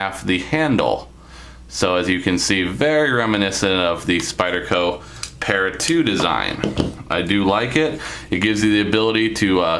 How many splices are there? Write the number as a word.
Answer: one